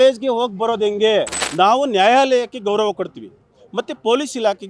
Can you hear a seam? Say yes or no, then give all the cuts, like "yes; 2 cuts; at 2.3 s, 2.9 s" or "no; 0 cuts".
yes; 1 cut; at 1.4 s